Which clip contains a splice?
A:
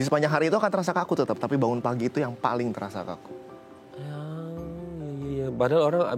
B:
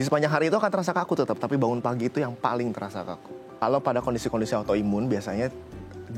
B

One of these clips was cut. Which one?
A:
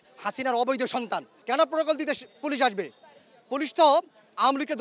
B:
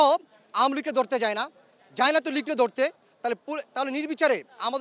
A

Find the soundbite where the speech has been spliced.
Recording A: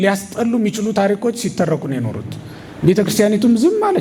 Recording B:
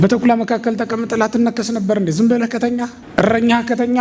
B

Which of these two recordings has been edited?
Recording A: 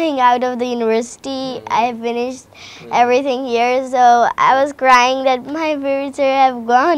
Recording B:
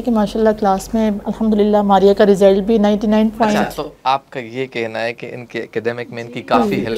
B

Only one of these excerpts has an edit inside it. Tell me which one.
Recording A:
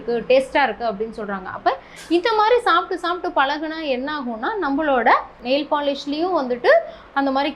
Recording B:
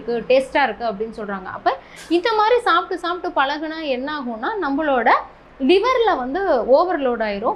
A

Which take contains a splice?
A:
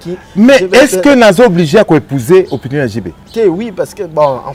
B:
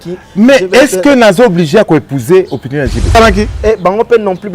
B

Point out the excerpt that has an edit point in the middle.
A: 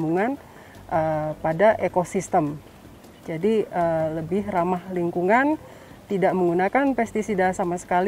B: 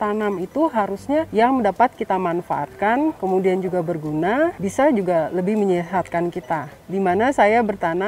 B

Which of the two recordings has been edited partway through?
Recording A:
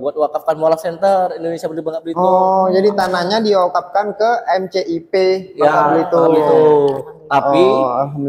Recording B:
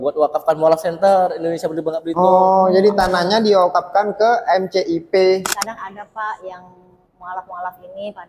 B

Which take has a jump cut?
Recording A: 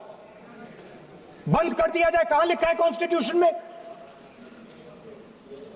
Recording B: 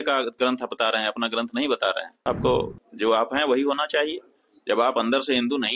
B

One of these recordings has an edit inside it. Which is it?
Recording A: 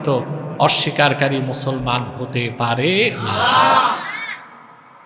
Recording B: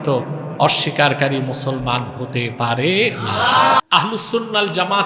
B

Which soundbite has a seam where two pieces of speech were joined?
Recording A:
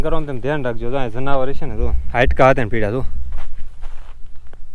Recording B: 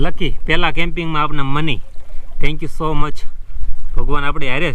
A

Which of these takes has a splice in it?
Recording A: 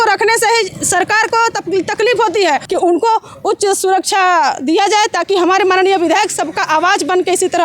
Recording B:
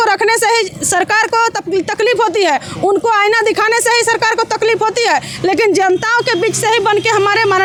A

